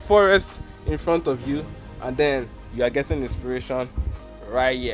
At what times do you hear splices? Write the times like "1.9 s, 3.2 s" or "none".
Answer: none